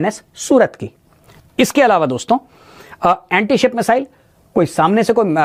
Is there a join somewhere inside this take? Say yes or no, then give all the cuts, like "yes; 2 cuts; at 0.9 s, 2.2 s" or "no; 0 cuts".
no; 0 cuts